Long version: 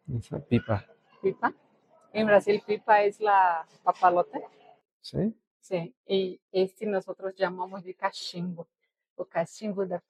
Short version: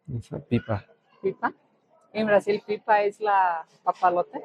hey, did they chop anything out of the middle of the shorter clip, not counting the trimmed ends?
no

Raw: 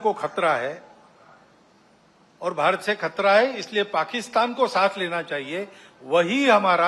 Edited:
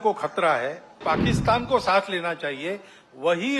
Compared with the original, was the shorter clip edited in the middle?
yes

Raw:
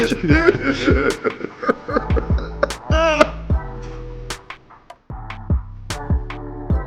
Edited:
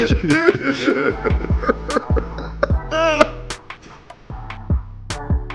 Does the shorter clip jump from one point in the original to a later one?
yes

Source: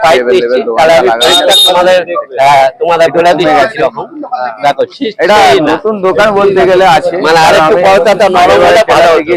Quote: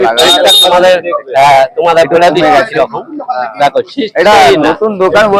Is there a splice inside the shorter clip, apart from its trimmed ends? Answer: no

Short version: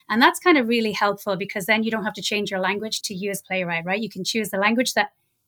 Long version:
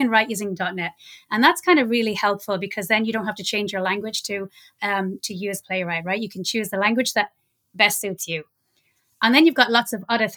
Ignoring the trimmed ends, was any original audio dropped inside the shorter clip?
yes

